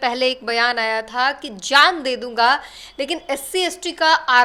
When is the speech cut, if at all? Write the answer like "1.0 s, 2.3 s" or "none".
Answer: none